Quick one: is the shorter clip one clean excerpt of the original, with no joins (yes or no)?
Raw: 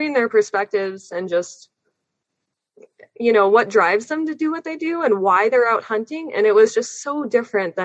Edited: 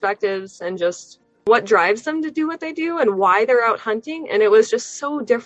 no